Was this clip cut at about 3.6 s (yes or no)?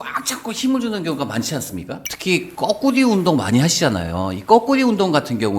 no